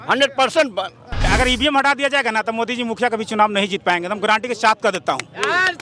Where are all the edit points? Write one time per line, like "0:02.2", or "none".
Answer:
0:01.3